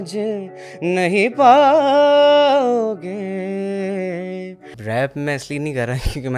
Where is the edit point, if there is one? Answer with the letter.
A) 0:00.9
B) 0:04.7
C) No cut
B